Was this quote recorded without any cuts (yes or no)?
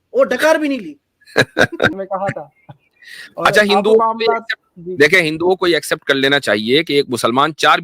no